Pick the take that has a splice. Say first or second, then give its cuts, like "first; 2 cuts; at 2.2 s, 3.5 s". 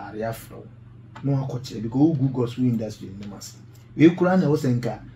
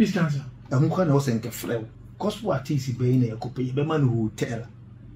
second; 1 cut; at 2.0 s